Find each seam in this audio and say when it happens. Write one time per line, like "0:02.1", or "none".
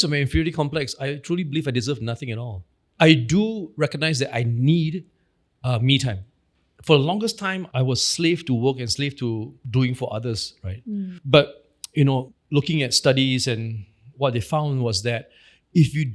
0:01.1
0:02.6
0:09.6
0:12.4

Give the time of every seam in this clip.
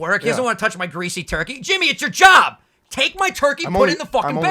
none

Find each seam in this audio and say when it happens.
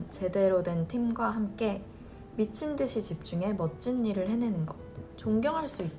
0:04.9

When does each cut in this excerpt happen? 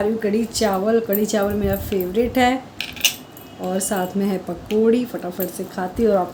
none

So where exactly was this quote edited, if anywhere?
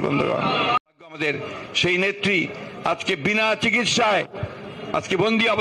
0:01.2

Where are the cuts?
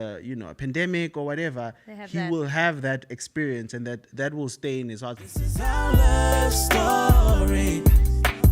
0:05.4

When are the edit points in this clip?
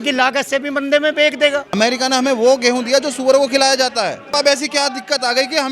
0:01.7
0:04.3

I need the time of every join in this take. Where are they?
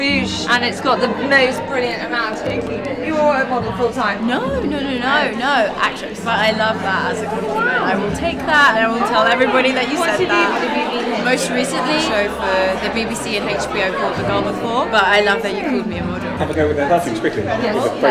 none

